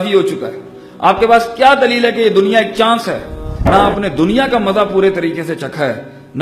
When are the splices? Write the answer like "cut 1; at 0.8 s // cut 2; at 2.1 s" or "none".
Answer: cut 1; at 3.6 s